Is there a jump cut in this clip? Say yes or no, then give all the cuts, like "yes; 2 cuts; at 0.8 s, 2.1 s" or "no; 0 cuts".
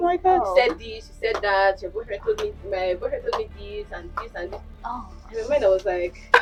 no; 0 cuts